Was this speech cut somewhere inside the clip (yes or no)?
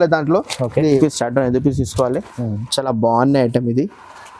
yes